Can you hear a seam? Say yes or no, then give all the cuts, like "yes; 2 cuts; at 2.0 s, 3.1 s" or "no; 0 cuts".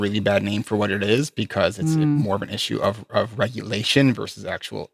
no; 0 cuts